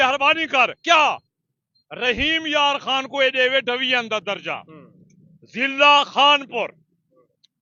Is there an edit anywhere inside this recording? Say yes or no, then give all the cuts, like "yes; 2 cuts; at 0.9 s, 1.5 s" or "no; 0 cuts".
no; 0 cuts